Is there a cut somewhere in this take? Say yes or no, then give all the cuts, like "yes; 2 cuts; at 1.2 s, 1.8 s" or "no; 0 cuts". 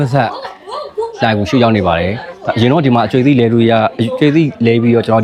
no; 0 cuts